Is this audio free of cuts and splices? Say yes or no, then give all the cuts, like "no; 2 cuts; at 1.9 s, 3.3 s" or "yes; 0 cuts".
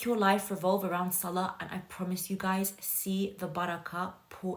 yes; 0 cuts